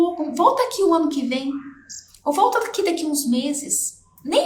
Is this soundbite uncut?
yes; 0 cuts

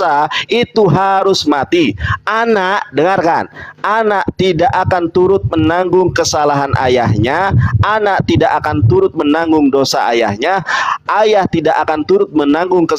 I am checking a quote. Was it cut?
no; 0 cuts

